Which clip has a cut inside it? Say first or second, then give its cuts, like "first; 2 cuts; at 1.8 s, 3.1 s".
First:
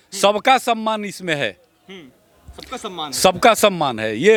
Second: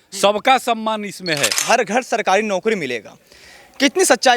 second; 1 cut; at 1.6 s